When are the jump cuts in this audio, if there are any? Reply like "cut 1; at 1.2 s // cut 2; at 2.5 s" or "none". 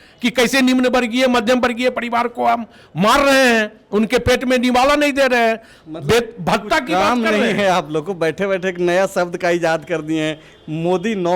none